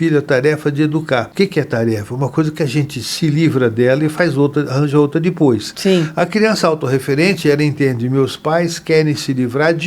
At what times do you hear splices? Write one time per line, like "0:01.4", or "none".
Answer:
0:01.3